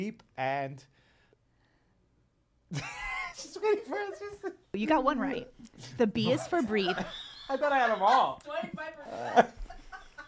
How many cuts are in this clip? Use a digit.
2